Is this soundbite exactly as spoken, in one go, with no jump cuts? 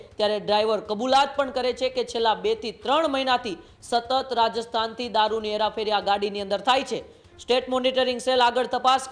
yes; 0 cuts

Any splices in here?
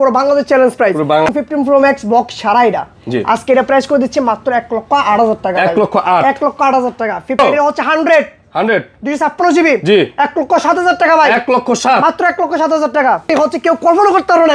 yes; 3 cuts; at 1.3 s, 7.4 s, 13.2 s

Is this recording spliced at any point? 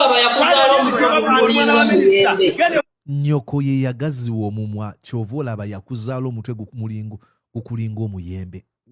no; 0 cuts

